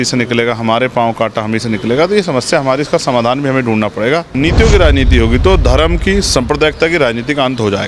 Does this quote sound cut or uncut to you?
cut